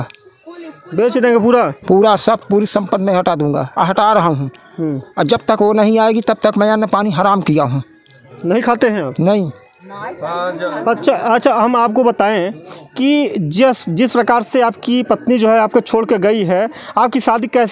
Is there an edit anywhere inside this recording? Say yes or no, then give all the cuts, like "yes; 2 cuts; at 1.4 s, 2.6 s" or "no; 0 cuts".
no; 0 cuts